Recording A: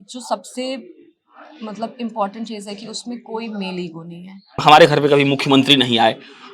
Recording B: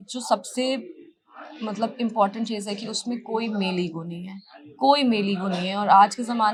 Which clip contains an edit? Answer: A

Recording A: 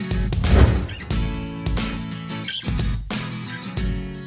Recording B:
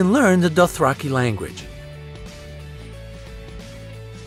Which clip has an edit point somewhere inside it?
A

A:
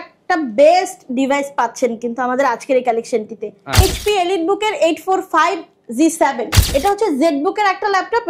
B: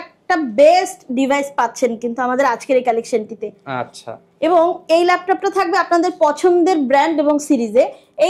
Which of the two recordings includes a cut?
A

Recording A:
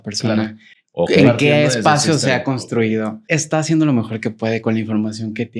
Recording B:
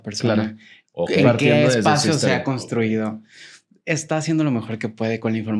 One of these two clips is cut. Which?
A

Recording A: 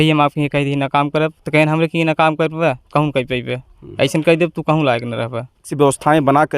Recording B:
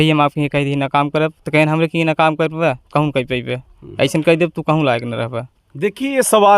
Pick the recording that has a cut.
A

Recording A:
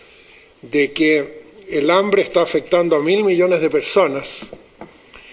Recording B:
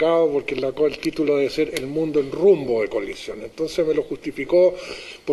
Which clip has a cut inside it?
A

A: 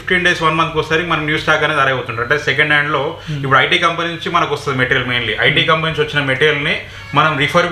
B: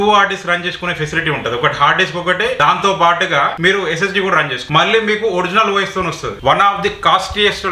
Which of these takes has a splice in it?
B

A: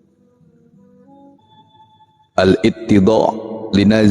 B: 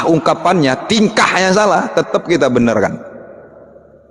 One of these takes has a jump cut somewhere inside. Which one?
A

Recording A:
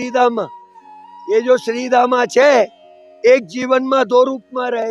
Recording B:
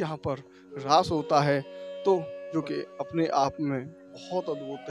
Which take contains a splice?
B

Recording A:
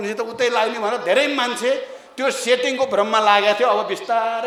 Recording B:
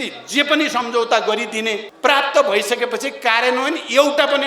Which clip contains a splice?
B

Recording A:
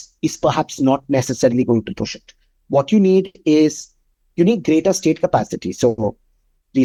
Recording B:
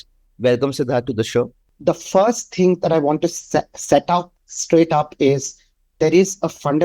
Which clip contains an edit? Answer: B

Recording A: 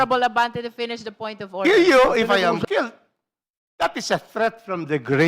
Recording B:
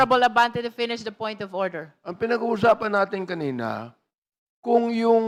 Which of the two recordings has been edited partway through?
A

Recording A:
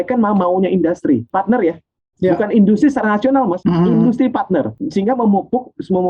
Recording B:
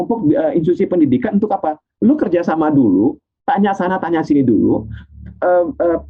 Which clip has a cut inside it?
A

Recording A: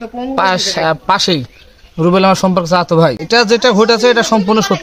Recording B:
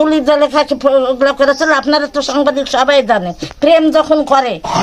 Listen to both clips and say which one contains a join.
A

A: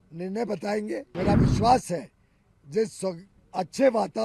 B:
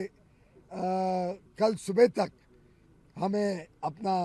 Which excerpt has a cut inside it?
A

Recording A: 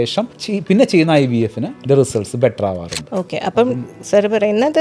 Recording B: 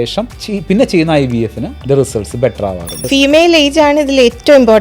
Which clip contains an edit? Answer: B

